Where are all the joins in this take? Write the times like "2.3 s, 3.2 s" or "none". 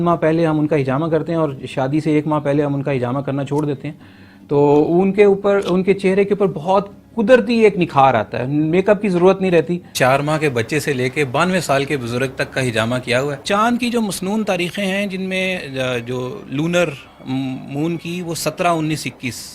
9.9 s, 13.4 s